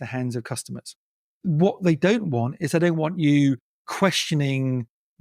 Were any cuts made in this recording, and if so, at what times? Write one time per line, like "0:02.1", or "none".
0:01.3